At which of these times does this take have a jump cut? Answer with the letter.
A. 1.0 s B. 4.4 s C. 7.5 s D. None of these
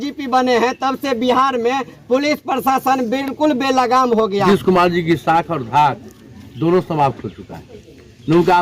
B